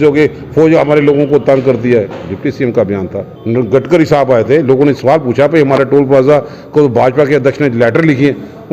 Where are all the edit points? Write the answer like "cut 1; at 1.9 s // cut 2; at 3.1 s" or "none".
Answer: cut 1; at 3.3 s